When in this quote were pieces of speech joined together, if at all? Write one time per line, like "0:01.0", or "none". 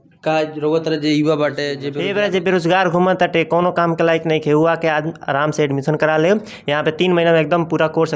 0:01.8